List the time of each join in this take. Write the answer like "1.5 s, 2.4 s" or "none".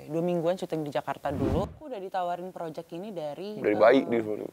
1.8 s